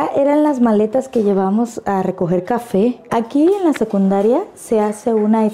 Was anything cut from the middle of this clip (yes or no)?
no